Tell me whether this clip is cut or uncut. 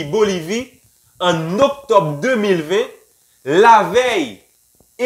uncut